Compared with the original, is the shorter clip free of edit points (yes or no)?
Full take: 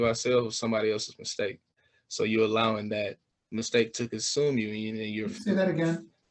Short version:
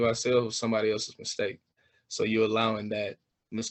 yes